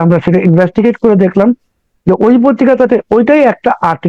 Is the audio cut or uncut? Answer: uncut